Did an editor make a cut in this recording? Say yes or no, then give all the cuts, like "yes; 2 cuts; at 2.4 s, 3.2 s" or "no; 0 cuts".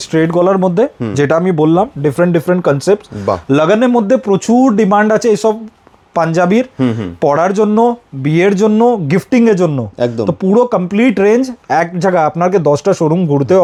no; 0 cuts